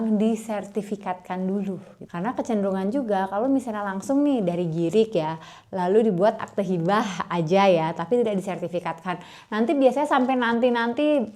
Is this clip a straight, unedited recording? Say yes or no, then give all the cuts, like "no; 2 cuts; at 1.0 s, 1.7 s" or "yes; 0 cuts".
no; 1 cut; at 2.0 s